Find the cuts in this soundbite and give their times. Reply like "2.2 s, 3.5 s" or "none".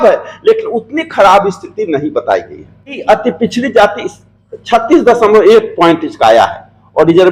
3.0 s